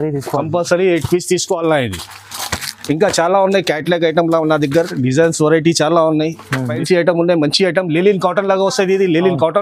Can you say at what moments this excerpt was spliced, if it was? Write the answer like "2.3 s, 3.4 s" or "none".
6.8 s